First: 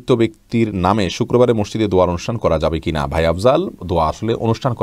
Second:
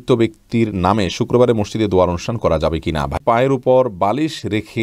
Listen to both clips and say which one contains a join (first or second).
second